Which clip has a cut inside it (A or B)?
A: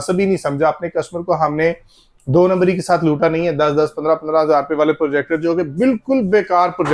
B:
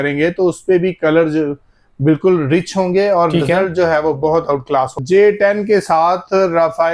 B